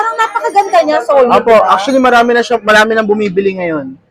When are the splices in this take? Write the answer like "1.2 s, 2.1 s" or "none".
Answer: none